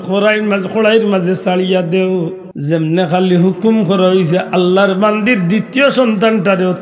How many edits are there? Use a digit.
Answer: 1